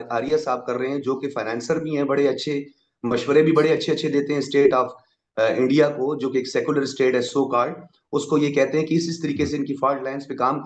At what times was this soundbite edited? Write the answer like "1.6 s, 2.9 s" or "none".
none